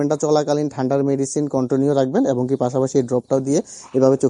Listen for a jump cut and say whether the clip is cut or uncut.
uncut